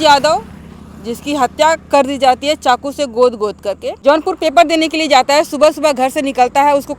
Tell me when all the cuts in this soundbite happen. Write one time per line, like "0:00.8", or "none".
none